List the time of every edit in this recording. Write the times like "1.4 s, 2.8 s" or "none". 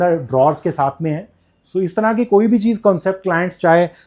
none